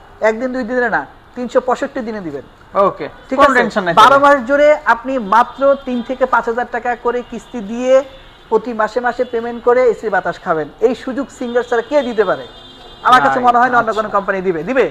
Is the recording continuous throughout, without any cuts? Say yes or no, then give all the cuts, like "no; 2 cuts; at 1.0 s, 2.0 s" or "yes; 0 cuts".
yes; 0 cuts